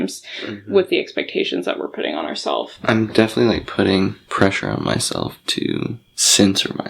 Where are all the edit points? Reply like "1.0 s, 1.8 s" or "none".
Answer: 2.7 s